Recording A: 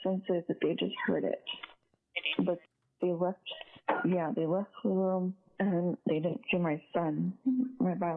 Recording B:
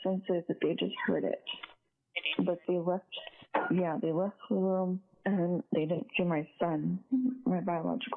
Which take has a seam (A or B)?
B